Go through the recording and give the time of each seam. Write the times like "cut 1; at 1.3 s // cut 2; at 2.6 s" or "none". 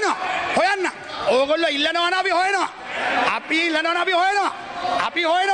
none